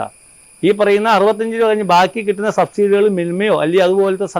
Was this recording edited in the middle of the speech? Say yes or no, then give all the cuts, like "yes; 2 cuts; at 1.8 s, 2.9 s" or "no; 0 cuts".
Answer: no; 0 cuts